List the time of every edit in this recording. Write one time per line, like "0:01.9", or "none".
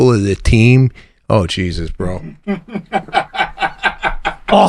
none